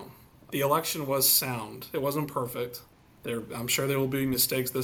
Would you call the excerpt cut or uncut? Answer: uncut